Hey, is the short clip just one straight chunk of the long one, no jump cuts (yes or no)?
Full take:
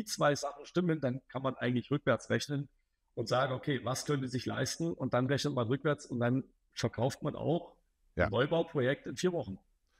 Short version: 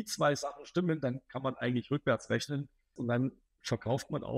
no